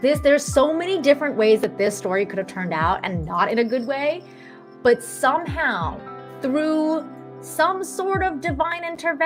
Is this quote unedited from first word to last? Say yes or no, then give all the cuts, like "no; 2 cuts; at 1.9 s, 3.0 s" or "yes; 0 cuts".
yes; 0 cuts